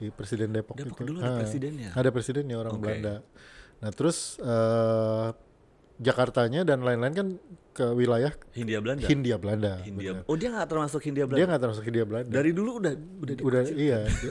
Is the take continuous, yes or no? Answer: yes